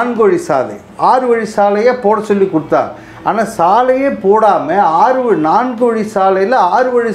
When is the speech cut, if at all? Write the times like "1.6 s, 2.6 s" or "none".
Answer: none